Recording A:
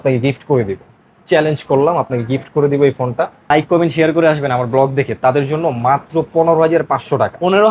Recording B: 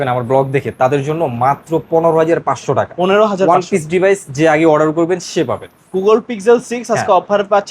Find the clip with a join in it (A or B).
A